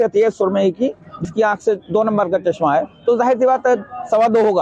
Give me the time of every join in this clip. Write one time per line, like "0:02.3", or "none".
0:01.3